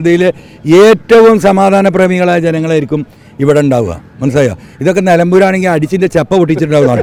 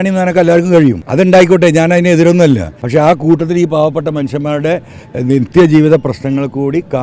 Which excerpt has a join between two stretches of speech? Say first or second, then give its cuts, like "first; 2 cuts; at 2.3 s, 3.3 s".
second; 2 cuts; at 1.0 s, 2.7 s